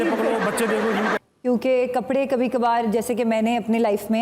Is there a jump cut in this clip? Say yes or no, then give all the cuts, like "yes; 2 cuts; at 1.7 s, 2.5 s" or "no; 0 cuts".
yes; 1 cut; at 1.2 s